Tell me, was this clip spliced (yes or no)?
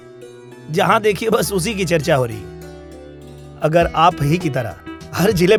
no